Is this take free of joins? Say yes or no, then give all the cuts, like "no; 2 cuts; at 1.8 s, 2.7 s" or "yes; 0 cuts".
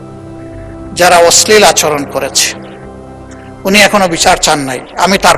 yes; 0 cuts